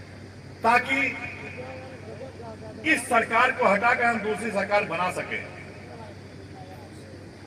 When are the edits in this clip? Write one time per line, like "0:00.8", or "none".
none